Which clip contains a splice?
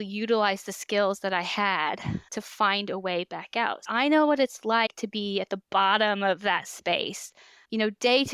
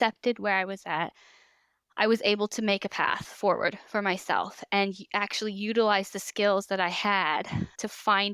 first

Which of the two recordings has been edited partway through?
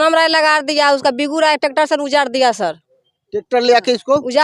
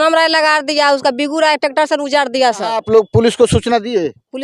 second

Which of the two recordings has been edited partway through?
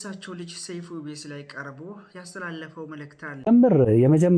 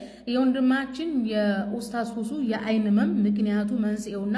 first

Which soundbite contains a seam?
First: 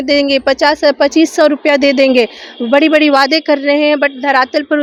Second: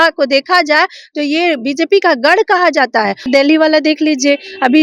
second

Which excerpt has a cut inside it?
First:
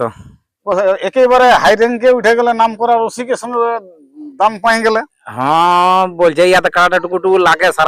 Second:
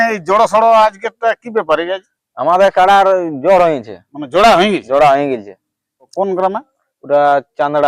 second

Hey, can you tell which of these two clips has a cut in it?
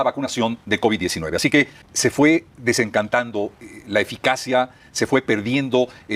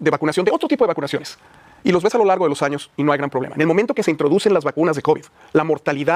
first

